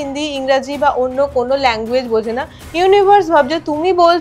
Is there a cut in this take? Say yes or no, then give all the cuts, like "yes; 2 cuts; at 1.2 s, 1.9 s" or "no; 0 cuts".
no; 0 cuts